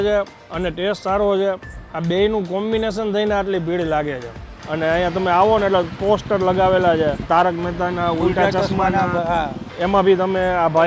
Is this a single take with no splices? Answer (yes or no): no